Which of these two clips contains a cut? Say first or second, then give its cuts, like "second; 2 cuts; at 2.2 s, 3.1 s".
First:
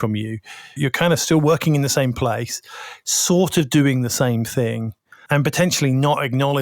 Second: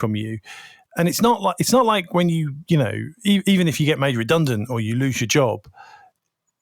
first; 2 cuts; at 0.8 s, 5.2 s